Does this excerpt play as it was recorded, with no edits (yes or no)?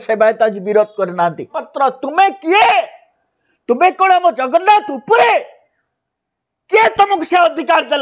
no